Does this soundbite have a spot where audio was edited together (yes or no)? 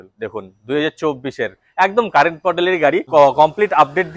yes